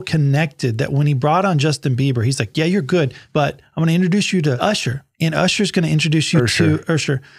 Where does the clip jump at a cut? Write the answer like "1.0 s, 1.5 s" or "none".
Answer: 3.2 s, 4.8 s